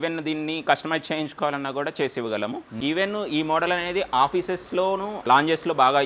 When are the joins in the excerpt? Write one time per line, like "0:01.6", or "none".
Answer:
0:02.7